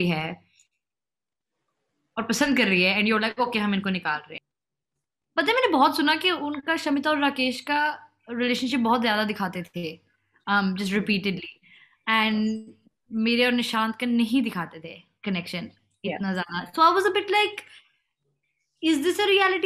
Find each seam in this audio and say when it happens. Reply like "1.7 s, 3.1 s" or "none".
4.4 s